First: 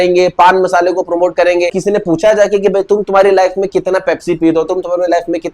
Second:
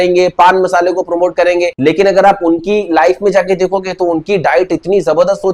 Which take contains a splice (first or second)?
first